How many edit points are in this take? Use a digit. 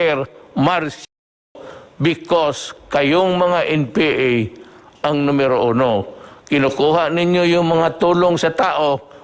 0